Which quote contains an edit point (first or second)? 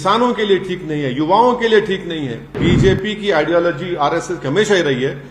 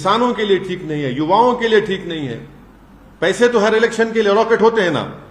first